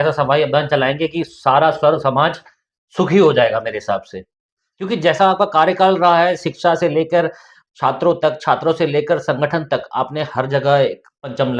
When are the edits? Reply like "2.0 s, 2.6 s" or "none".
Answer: none